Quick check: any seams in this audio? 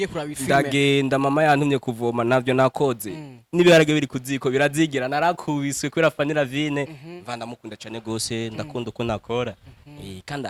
no; 0 cuts

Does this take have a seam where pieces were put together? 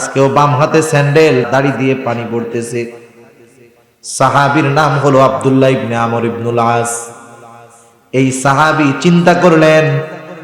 yes; 1 cut; at 1.5 s

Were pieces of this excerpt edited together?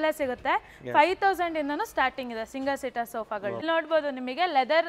no; 0 cuts

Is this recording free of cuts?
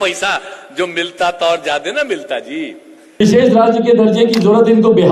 no; 1 cut; at 3.2 s

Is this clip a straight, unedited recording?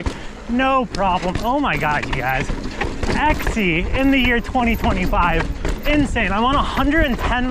yes; 0 cuts

